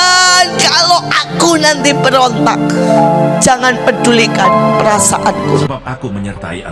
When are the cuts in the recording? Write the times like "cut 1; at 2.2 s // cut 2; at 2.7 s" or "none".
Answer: cut 1; at 5.7 s